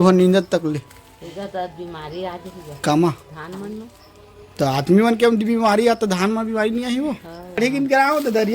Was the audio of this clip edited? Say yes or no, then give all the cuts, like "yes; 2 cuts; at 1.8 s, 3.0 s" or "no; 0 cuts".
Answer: yes; 1 cut; at 7.6 s